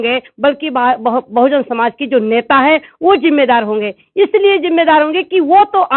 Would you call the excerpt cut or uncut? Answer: uncut